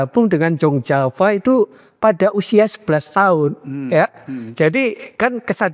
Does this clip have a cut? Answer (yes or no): no